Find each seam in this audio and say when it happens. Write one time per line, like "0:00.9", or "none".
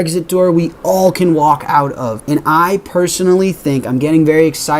0:02.2